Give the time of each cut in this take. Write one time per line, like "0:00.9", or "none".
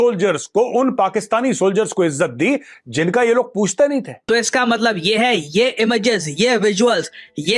0:04.3